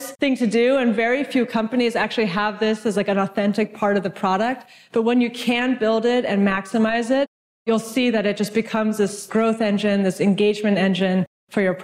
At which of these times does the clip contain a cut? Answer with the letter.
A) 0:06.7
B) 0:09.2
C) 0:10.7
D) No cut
B